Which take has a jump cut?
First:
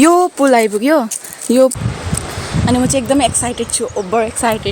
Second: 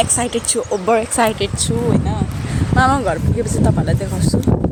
first; 1 cut; at 1.7 s

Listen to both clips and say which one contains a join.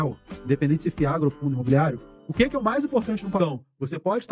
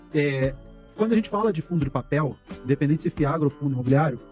first; 1 cut; at 3.4 s

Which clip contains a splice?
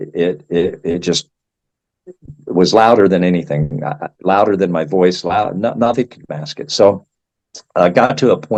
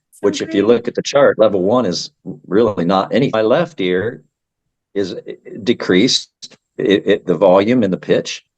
second; 1 cut; at 3.3 s

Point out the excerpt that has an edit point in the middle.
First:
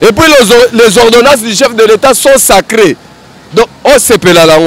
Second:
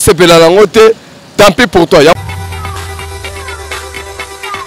second; 1 cut; at 2.1 s

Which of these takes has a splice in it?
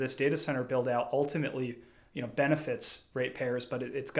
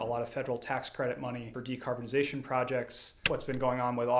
second; 2 cuts; at 1.5 s, 3.2 s

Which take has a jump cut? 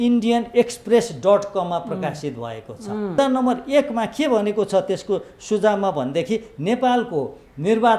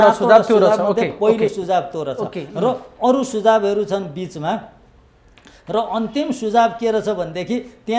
first; 1 cut; at 3.2 s

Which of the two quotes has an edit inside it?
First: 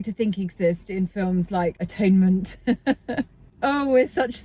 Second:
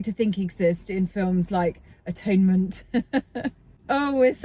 first; 1 cut; at 1.8 s

